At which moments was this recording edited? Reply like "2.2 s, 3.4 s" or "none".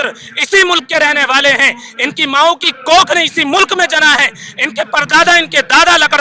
none